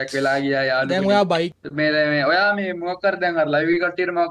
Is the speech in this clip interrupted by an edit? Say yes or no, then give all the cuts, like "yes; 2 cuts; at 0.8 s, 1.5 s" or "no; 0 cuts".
yes; 1 cut; at 1.5 s